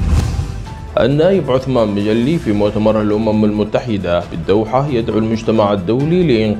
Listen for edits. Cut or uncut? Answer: cut